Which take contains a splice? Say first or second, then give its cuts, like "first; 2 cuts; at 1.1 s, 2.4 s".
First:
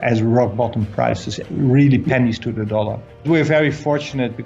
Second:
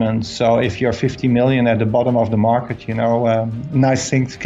first; 1 cut; at 3.2 s